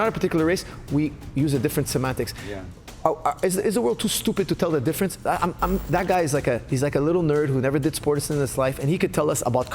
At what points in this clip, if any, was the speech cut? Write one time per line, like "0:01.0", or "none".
0:05.8